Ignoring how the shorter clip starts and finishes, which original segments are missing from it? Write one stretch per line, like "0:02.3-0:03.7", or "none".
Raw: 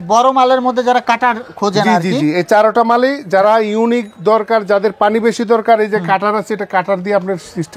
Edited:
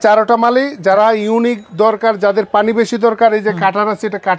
none